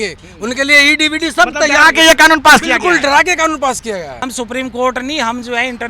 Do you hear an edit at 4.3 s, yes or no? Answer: yes